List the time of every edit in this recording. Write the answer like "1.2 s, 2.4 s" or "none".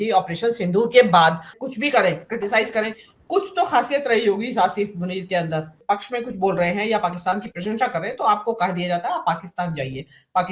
1.6 s, 5.8 s

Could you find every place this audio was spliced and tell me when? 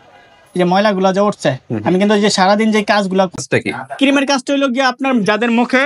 3.4 s

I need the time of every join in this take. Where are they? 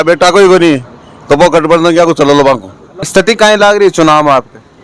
2.9 s

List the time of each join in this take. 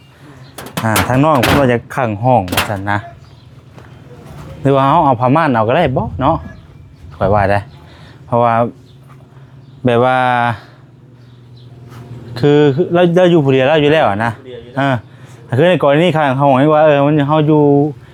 none

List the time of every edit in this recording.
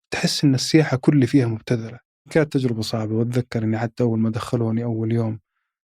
2.2 s

